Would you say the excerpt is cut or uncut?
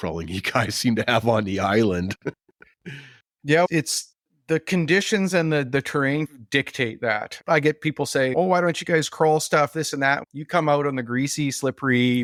uncut